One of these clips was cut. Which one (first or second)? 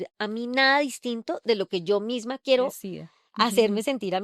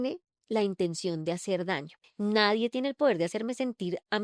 second